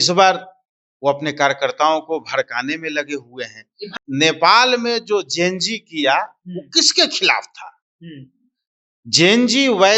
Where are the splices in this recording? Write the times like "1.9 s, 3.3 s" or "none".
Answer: 3.8 s